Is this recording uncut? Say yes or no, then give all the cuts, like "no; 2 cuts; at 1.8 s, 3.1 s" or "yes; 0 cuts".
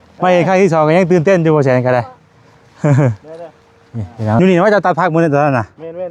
no; 1 cut; at 4.4 s